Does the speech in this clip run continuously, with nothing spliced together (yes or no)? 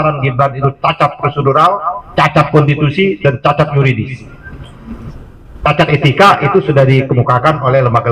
yes